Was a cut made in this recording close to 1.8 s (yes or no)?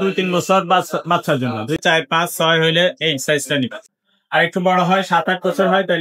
yes